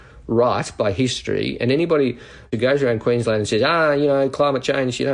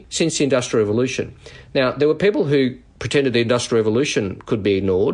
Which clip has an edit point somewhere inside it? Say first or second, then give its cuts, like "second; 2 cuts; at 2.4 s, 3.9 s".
first; 1 cut; at 2.5 s